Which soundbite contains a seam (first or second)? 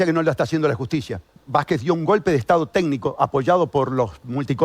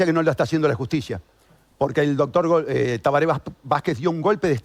first